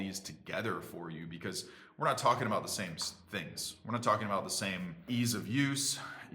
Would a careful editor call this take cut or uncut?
cut